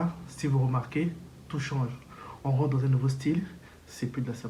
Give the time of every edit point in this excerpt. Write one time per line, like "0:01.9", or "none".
none